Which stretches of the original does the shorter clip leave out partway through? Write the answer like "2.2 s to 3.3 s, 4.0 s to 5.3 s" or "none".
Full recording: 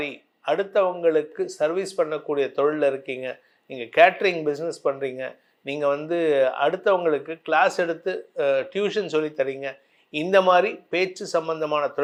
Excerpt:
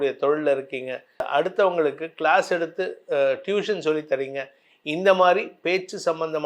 3.6 s to 6.5 s